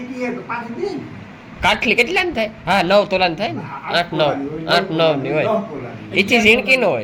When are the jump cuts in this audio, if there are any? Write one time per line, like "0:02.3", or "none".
none